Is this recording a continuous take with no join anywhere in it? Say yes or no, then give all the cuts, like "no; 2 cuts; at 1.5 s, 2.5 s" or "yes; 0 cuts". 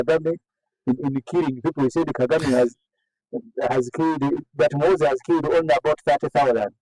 yes; 0 cuts